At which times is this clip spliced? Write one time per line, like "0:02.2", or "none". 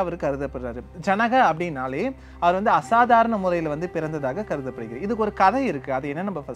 none